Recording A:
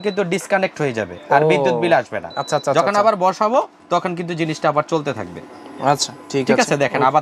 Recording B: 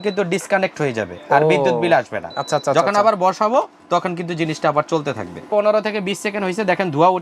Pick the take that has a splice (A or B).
B